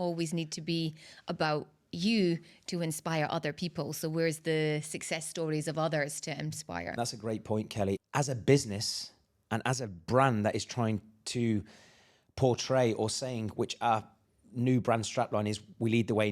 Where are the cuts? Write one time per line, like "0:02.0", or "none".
0:06.9
0:08.0